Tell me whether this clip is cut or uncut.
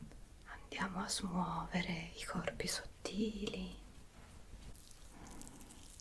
cut